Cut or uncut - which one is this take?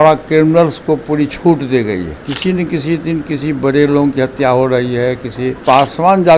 cut